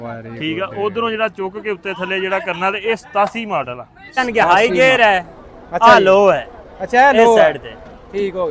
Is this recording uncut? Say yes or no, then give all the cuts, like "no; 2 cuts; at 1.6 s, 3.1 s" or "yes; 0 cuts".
no; 1 cut; at 4.2 s